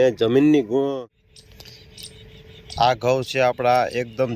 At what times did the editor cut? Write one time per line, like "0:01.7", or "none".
0:00.9